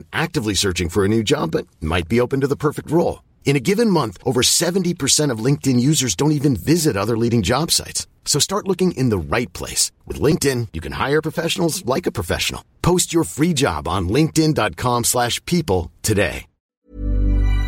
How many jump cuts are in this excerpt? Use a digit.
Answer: 1